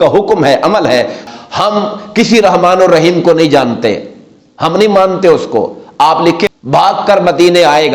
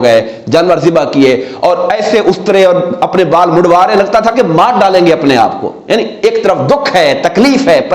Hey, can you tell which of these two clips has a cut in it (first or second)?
first